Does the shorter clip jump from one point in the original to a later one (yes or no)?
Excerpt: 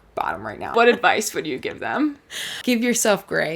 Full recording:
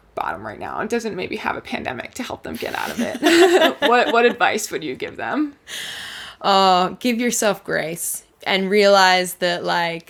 yes